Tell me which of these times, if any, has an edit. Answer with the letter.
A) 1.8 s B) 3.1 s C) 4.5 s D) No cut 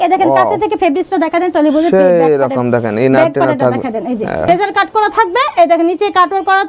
C